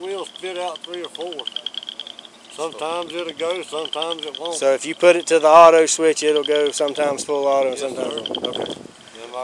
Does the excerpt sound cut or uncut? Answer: uncut